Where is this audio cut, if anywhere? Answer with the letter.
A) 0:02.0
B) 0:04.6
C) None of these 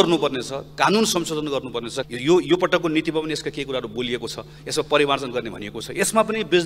C